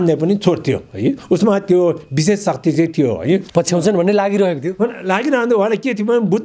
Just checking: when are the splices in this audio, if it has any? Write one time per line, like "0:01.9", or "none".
0:03.4

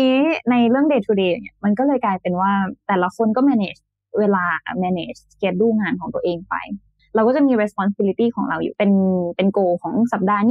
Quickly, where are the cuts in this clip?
0:06.9

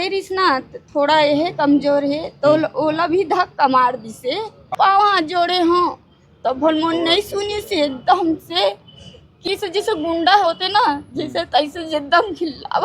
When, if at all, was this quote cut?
0:04.7
0:09.4

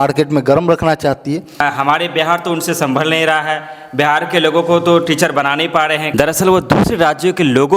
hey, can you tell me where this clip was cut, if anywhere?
0:01.6
0:06.1

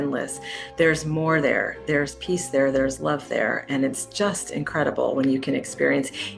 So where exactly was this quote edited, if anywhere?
none

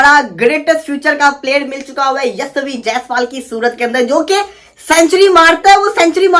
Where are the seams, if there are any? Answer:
none

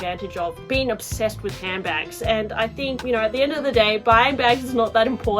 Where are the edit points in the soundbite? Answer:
0:03.0

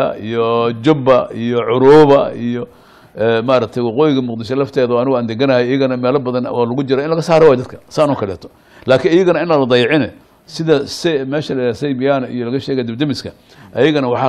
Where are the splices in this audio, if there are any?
none

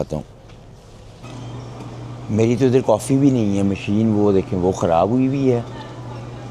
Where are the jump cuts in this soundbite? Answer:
0:01.3

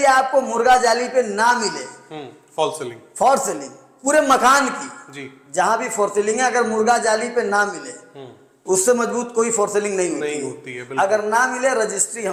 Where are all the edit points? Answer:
none

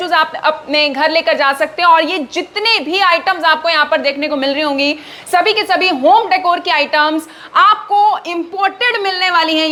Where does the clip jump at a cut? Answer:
none

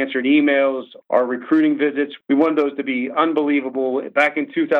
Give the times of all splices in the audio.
0:00.9
0:02.2

